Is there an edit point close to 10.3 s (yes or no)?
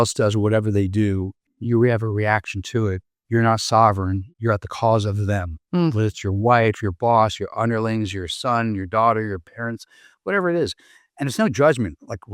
no